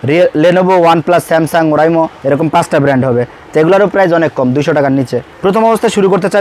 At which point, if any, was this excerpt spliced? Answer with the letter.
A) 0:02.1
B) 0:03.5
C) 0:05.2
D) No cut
C